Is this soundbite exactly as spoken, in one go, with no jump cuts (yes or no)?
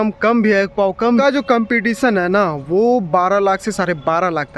no